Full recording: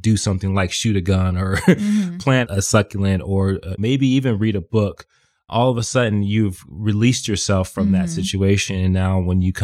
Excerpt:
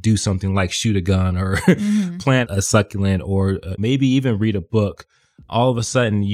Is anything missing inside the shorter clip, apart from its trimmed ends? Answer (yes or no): no